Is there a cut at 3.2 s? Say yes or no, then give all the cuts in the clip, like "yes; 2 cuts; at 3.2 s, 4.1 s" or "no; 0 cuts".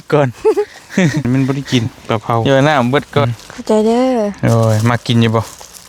yes; 3 cuts; at 1.2 s, 2.4 s, 3.2 s